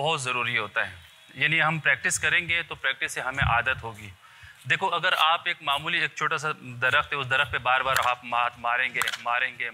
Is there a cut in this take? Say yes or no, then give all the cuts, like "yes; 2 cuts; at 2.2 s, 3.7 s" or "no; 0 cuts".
no; 0 cuts